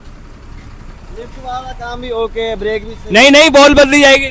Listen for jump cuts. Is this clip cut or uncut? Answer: uncut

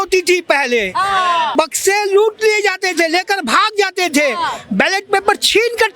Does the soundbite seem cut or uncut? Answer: cut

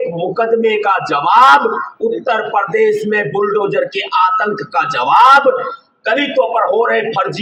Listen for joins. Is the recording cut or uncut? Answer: uncut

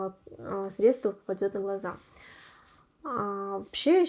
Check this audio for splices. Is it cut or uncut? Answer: uncut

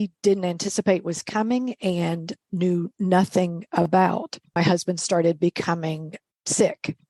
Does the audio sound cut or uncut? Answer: cut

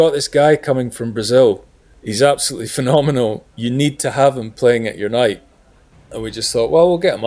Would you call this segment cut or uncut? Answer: cut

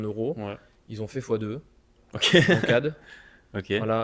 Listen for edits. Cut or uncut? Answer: uncut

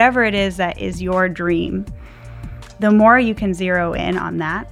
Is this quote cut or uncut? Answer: uncut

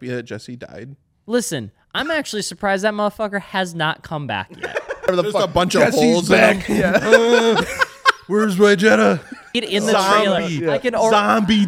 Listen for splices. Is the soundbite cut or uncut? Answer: cut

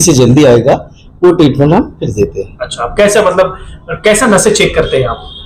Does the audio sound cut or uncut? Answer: uncut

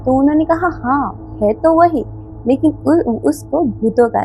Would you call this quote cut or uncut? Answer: uncut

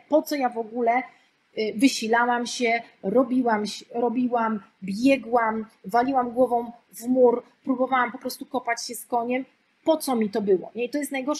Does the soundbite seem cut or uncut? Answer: uncut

